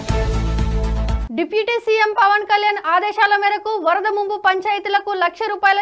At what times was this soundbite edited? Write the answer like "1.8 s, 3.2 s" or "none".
1.2 s